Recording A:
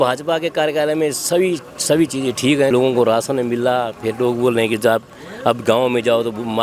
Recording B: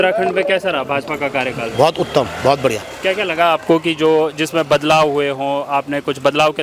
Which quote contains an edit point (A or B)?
A